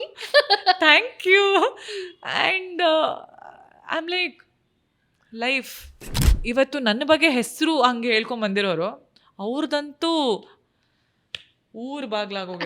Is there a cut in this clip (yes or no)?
yes